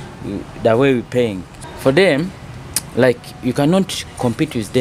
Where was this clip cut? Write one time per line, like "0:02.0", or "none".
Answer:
0:01.5